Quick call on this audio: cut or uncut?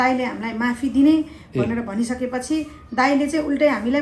uncut